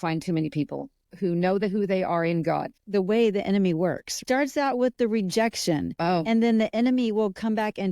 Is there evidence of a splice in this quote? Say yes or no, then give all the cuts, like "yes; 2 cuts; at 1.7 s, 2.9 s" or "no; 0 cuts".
yes; 3 cuts; at 1.1 s, 2.8 s, 4.2 s